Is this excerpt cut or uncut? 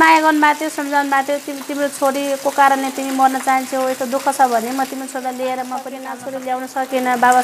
cut